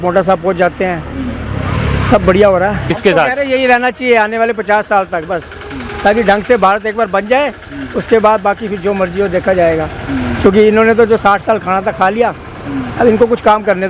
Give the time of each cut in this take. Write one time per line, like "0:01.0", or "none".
0:02.8